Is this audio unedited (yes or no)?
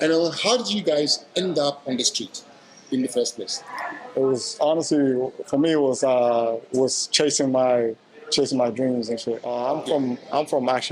no